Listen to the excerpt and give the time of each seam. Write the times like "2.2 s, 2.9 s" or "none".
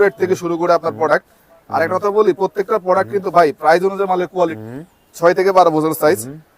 4.6 s